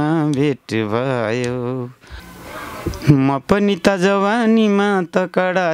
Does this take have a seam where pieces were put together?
no; 0 cuts

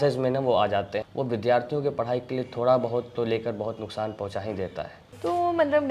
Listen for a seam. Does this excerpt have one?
yes; 2 cuts; at 1.0 s, 5.0 s

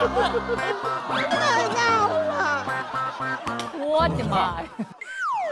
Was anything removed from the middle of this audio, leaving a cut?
no; 0 cuts

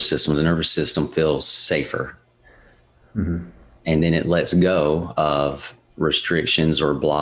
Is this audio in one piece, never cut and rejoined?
yes; 0 cuts

